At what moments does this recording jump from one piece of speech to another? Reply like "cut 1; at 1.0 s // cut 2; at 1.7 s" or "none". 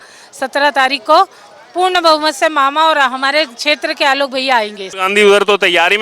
cut 1; at 4.8 s